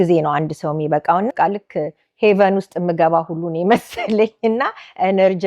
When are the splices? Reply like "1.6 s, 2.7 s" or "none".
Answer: 1.3 s